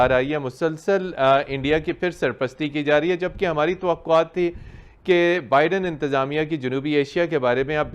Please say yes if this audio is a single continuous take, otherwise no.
yes